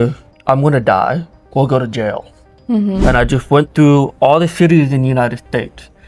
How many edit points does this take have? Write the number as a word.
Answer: one